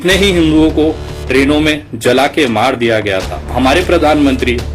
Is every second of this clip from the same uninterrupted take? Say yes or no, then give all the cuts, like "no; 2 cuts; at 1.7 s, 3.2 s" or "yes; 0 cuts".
no; 1 cut; at 3.4 s